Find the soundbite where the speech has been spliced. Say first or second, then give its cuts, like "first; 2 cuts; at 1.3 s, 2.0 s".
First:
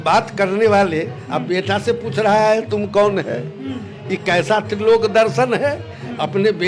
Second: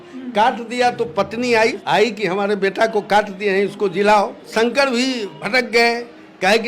second; 3 cuts; at 1.8 s, 4.5 s, 5.3 s